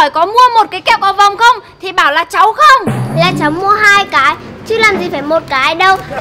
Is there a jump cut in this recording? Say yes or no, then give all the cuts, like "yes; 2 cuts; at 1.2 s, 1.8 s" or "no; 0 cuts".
no; 0 cuts